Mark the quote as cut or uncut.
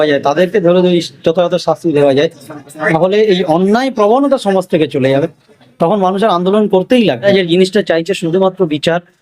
cut